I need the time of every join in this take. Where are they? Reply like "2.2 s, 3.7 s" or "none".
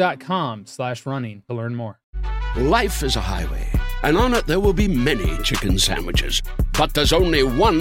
2.1 s